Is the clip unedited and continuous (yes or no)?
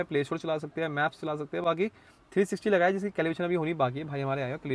yes